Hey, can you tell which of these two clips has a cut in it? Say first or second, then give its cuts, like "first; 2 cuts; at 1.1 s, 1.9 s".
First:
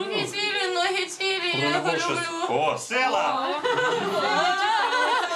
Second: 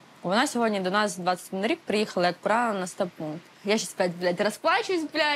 second; 1 cut; at 3.6 s